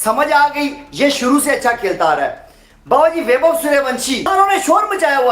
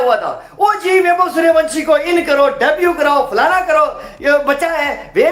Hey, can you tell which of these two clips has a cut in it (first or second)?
first